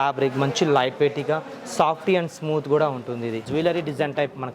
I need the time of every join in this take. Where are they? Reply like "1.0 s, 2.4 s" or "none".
3.5 s